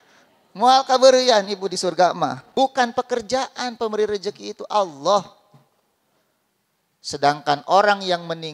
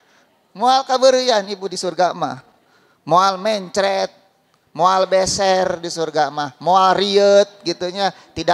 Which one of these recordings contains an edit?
first; 1 cut; at 2.4 s

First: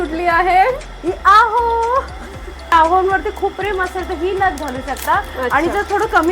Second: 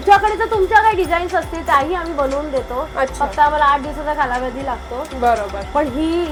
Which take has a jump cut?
first; 1 cut; at 2.7 s

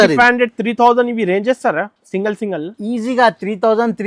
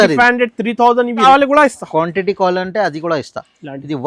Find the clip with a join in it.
second; 1 cut; at 1.2 s

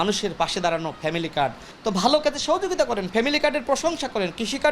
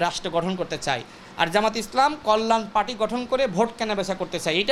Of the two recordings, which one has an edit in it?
first; 1 cut; at 1.7 s

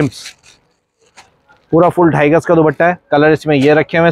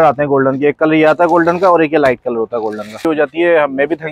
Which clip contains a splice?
second; 1 cut; at 3.0 s

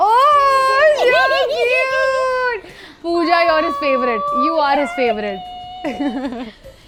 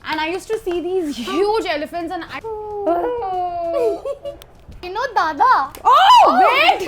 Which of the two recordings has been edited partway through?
second; 2 cuts; at 2.3 s, 4.9 s

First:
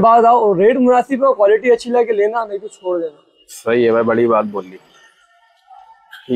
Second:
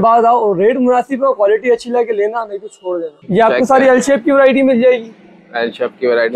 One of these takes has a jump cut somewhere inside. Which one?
second; 1 cut; at 3.2 s

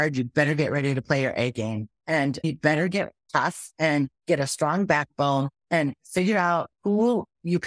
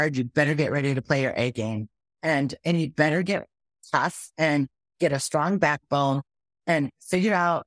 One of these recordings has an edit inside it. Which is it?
first; 4 cuts; at 2.2 s, 3.2 s, 4.2 s, 5.6 s

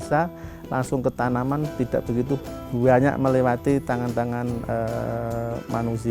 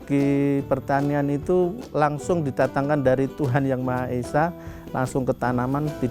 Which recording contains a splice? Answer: second; 1 cut; at 1.8 s

